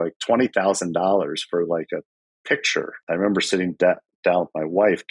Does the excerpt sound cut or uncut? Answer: cut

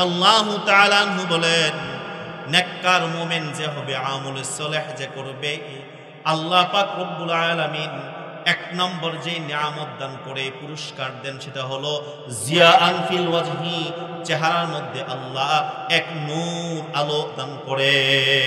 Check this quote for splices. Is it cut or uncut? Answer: uncut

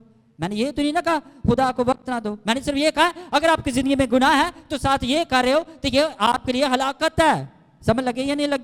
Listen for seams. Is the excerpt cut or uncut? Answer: uncut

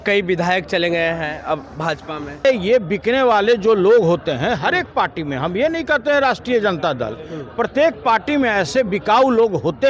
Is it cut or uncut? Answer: cut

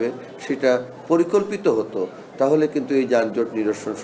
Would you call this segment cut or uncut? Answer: uncut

